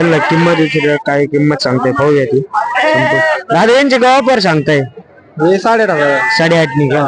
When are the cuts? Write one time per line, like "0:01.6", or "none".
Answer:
none

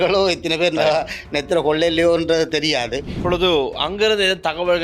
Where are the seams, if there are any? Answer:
0:03.1

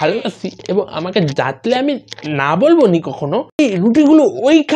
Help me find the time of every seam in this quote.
0:03.6

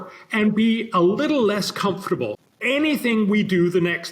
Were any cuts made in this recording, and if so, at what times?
0:02.4

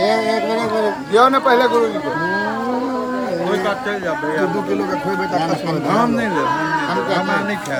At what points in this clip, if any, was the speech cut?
none

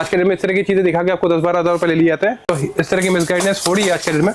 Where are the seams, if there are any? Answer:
0:02.4

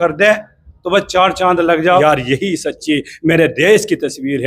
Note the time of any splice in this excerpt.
0:02.0

